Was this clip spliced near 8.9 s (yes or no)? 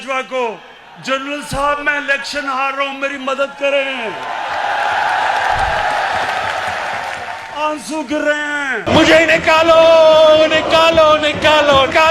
yes